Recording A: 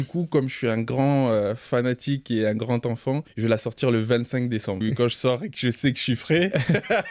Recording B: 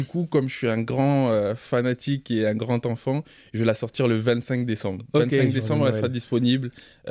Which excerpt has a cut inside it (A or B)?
A